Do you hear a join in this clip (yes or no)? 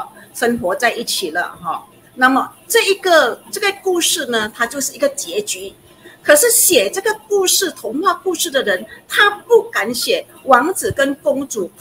no